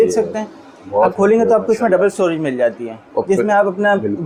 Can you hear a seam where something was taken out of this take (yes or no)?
no